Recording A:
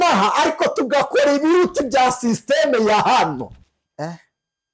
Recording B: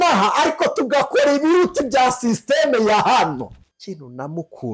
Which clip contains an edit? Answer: B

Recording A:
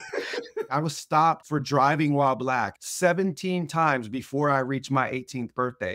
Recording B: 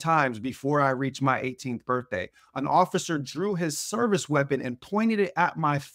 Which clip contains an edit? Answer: A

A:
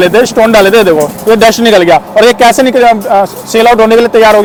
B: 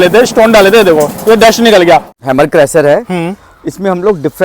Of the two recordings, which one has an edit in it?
B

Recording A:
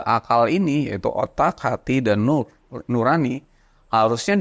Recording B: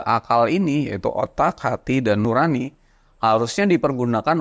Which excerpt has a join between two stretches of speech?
B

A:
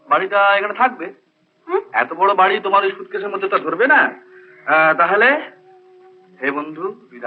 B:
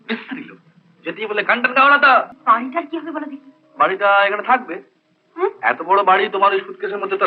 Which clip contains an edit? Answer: B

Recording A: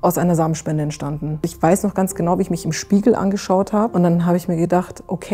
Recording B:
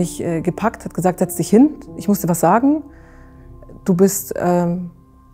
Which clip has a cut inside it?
A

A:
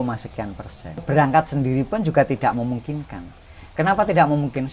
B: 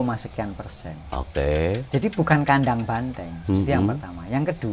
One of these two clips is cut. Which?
A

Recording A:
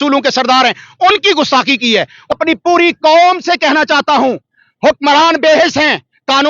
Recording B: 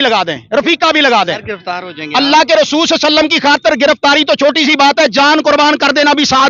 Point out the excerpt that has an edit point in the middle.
A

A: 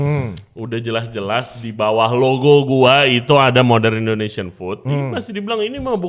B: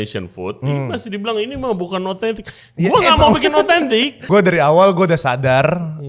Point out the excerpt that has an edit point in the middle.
B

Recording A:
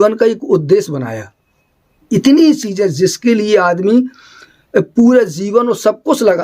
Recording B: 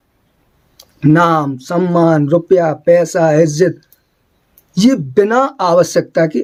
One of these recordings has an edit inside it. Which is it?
A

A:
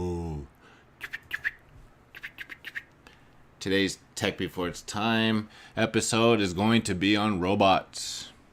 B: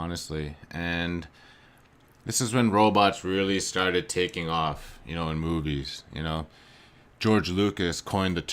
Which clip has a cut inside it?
B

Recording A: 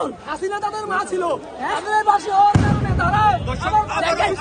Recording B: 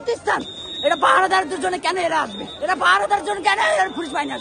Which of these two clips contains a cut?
B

